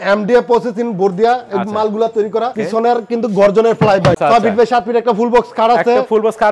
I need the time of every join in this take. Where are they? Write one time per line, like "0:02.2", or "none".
0:02.6
0:04.2